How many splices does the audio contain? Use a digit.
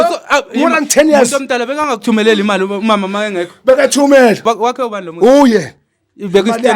1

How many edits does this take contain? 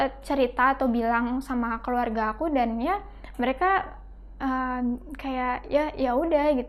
0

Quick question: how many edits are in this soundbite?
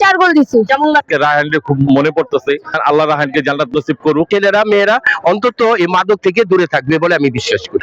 2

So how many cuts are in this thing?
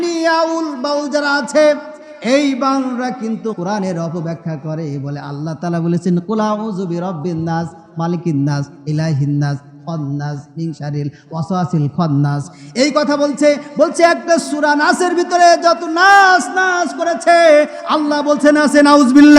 1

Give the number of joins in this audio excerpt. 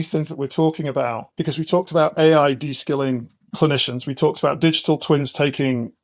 2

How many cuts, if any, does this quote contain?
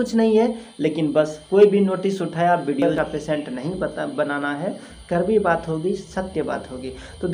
1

